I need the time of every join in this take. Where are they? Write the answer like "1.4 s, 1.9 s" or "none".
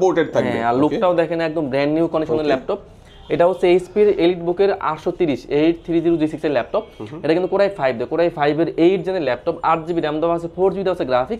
none